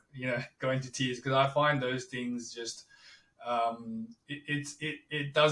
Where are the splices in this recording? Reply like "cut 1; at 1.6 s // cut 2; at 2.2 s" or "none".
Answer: none